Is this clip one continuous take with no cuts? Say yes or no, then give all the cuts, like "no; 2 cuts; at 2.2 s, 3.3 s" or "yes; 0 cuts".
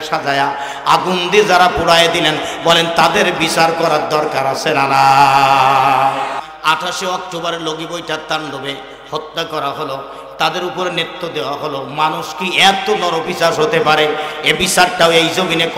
no; 1 cut; at 6.4 s